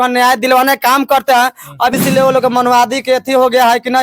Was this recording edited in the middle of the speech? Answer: yes; 1 cut; at 1.9 s

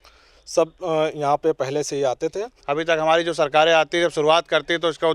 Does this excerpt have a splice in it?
yes; 1 cut; at 2.5 s

